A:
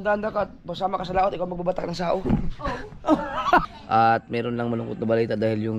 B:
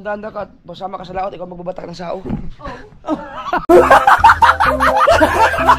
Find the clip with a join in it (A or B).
A